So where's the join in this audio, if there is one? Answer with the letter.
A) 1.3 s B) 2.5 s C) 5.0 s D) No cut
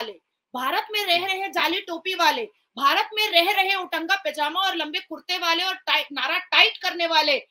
D